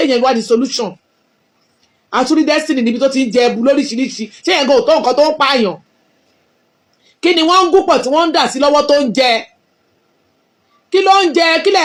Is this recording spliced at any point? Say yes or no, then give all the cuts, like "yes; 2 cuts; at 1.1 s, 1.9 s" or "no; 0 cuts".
no; 0 cuts